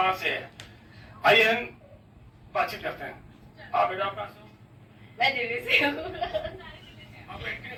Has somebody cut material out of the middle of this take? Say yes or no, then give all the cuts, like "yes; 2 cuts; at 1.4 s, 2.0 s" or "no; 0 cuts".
no; 0 cuts